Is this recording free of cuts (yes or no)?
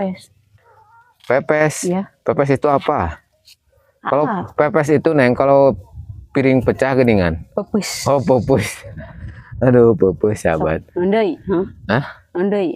yes